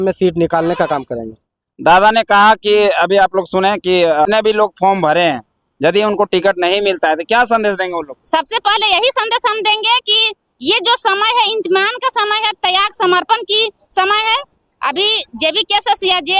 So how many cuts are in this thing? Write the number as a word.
one